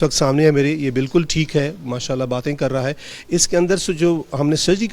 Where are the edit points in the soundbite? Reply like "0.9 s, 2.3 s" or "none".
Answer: none